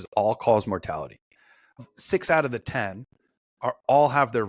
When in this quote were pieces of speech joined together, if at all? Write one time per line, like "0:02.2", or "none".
0:01.8